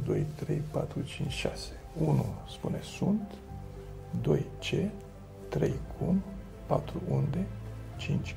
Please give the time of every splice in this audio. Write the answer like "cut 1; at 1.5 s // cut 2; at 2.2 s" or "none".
none